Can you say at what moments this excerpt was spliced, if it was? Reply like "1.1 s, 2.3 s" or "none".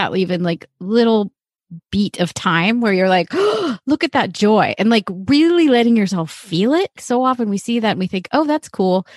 7.0 s